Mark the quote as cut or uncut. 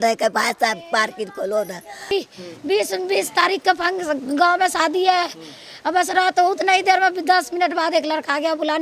cut